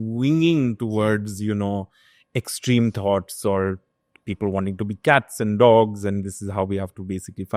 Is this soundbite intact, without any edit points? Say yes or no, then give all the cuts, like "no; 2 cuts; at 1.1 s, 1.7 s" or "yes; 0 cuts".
yes; 0 cuts